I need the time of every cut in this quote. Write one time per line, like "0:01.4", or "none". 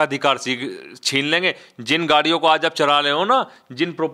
none